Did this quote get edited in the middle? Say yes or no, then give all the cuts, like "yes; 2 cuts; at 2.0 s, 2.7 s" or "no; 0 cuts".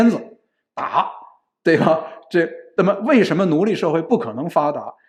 no; 0 cuts